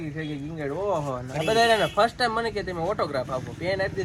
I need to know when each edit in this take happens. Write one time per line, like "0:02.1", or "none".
none